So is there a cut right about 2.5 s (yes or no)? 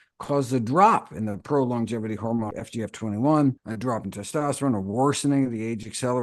yes